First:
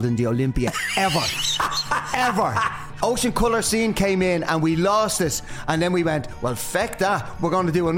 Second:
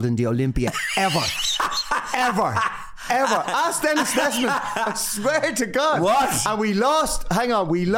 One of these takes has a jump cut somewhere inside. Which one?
first; 1 cut; at 2.8 s

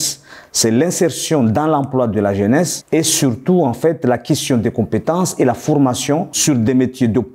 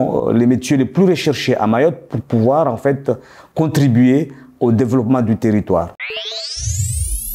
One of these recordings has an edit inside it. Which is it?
second; 1 cut; at 6.0 s

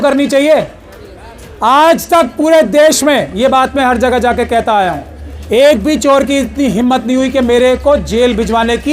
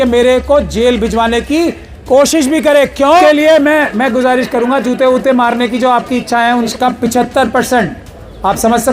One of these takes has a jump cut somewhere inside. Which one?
second; 2 cuts; at 3.2 s, 6.7 s

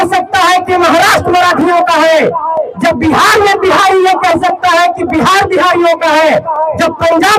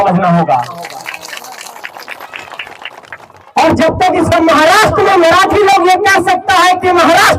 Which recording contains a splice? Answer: second; 1 cut; at 4.3 s

